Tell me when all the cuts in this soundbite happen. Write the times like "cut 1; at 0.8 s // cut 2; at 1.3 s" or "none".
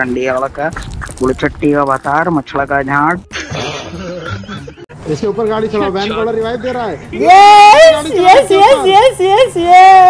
cut 1; at 0.9 s // cut 2; at 4.9 s